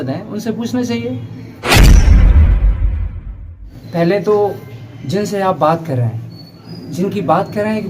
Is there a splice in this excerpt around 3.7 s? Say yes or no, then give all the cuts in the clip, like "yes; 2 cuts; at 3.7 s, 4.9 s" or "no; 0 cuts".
yes; 2 cuts; at 1.5 s, 3.7 s